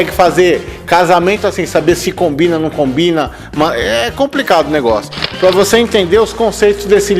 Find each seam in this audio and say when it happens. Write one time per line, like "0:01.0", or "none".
0:05.1